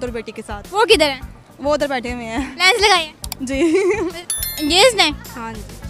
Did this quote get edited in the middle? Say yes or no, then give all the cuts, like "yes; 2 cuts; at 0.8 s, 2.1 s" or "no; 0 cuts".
yes; 1 cut; at 4.1 s